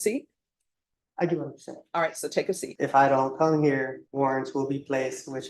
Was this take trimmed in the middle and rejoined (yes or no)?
yes